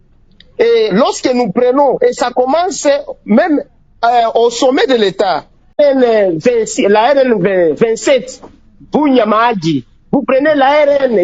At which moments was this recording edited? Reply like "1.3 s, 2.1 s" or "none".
5.8 s